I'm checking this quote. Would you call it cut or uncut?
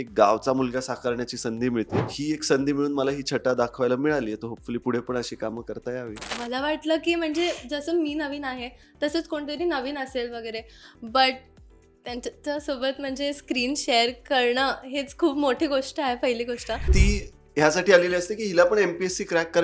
cut